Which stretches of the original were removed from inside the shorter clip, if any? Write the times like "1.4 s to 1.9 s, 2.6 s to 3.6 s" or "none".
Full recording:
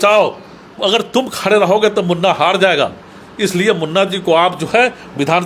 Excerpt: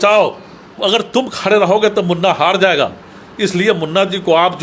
none